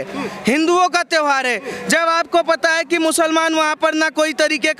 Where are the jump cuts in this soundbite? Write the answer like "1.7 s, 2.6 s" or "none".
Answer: none